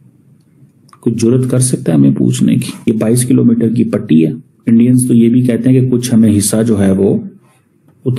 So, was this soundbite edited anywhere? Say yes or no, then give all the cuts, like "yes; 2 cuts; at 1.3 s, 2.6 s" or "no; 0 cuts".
yes; 2 cuts; at 2.8 s, 4.5 s